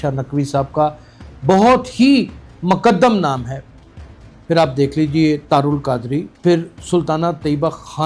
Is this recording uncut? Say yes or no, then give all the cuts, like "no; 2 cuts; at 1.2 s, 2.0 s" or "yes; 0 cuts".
yes; 0 cuts